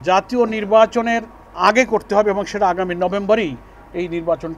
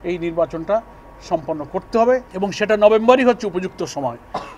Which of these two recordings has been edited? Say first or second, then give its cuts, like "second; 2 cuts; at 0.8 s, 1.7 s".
second; 1 cut; at 2.3 s